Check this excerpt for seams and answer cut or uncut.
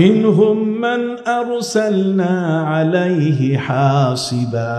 uncut